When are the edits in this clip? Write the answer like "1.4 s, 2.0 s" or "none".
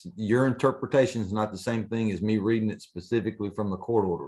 none